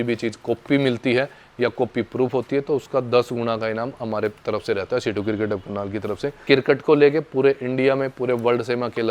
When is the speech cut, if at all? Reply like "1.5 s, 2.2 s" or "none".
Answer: 6.3 s